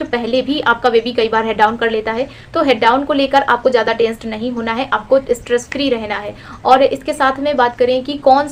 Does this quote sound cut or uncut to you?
uncut